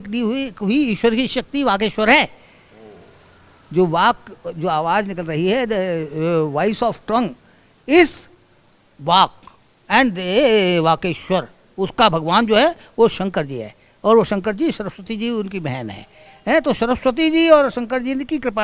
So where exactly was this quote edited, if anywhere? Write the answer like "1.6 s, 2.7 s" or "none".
none